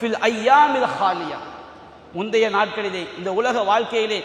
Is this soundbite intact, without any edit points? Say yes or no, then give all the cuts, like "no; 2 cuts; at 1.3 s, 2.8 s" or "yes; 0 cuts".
yes; 0 cuts